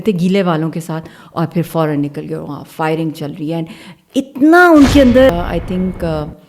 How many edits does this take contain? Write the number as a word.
one